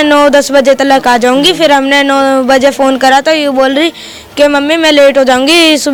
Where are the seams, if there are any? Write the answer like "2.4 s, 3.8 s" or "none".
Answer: none

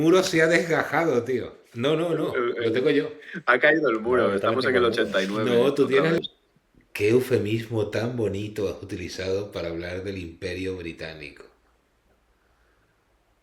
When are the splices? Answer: 6.2 s

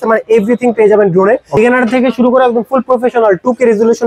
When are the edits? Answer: 1.6 s

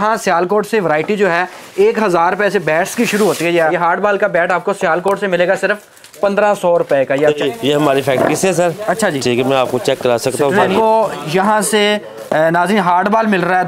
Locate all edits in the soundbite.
3.7 s, 7.4 s, 10.7 s

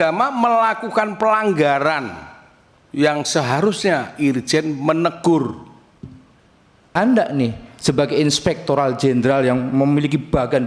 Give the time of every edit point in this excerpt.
6.9 s

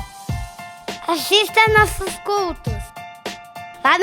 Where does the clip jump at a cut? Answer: 1.0 s

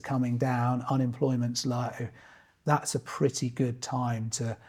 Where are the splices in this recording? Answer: none

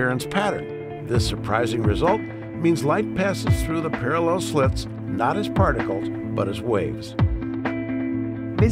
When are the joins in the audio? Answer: 1.7 s

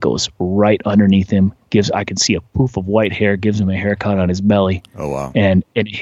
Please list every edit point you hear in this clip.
none

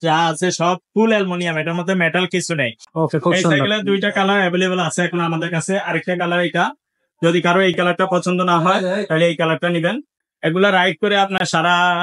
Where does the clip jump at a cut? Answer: 2.8 s, 10.2 s

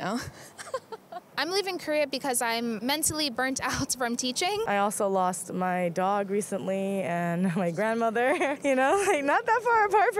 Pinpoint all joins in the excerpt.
1.2 s, 4.7 s, 8.6 s

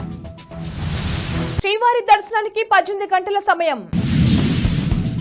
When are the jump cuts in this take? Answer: 1.5 s

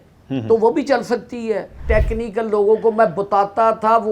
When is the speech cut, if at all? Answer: 1.8 s

